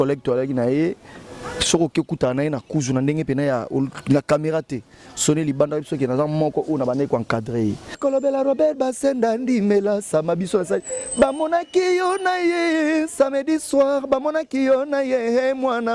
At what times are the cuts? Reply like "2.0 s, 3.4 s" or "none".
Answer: 8.0 s